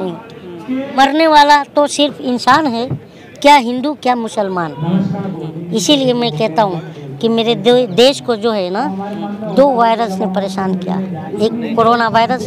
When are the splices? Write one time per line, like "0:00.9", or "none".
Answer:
0:01.0
0:05.4
0:11.2

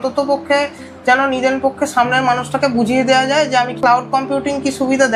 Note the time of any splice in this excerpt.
0:03.8

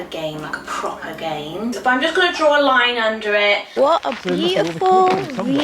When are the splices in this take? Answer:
0:01.8
0:03.7

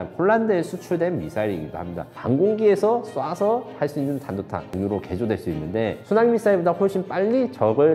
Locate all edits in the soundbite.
0:02.2
0:04.7
0:06.0

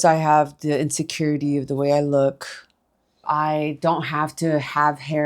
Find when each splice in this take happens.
0:03.2

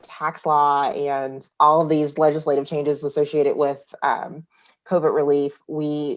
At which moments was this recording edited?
0:01.5

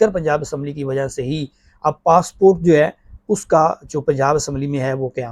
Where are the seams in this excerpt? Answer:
none

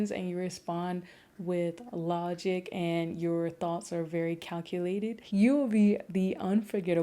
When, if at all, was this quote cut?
0:05.2

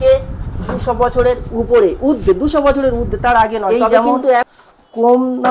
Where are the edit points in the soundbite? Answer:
0:04.5

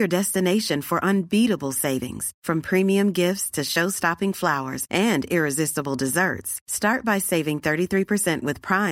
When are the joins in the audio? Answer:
none

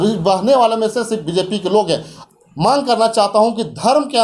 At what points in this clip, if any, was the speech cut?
0:02.1

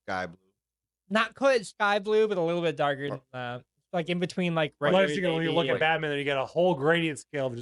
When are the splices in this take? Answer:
none

